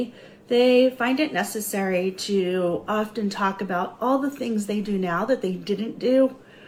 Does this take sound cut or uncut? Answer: uncut